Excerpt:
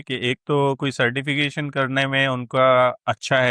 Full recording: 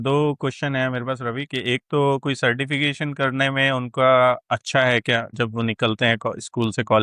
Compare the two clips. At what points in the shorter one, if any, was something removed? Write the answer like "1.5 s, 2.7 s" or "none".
none